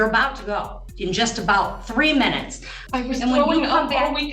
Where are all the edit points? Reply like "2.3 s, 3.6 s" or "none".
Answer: 2.7 s